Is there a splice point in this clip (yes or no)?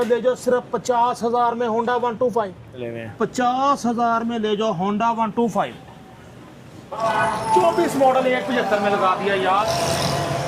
yes